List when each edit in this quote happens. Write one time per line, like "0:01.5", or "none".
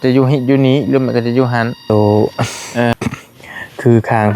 0:01.9